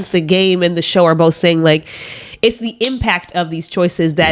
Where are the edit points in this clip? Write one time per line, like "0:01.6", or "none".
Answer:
none